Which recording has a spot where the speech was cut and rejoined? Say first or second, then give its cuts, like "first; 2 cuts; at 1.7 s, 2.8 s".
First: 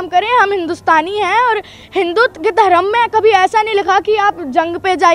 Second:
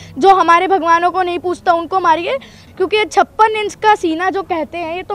second; 1 cut; at 2.6 s